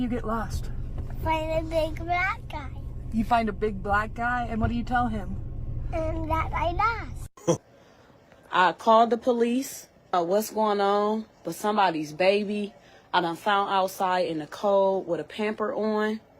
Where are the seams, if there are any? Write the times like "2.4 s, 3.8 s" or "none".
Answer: 7.6 s